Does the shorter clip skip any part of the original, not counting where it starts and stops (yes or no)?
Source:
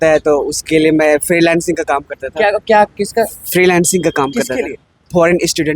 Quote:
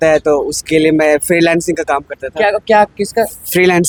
no